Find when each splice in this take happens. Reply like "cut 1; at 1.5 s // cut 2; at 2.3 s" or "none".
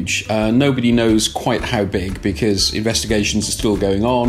none